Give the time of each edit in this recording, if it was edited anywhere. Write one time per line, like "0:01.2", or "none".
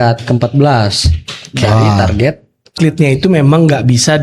0:02.7